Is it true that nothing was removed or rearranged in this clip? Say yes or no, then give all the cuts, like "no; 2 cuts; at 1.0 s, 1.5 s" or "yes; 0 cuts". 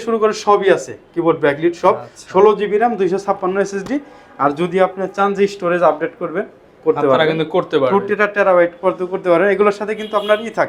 yes; 0 cuts